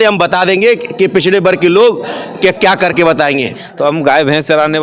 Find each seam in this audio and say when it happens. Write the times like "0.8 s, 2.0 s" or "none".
3.6 s